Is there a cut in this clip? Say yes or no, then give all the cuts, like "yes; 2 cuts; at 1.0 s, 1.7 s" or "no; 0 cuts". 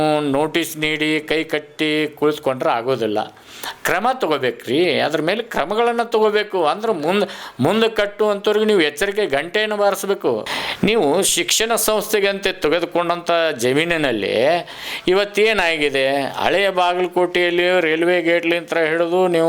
yes; 1 cut; at 10.6 s